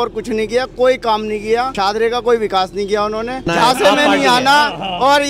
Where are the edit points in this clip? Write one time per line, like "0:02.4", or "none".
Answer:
0:01.7
0:03.5